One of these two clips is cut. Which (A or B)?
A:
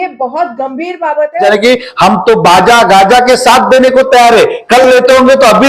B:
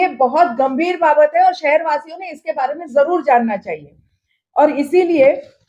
A